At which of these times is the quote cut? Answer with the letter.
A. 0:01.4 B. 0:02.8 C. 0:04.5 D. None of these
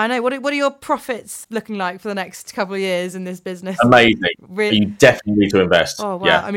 A